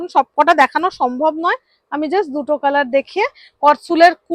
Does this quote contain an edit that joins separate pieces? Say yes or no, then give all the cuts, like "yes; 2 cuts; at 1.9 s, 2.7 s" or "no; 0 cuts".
no; 0 cuts